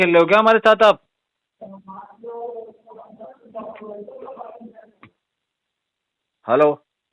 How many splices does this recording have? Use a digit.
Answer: 0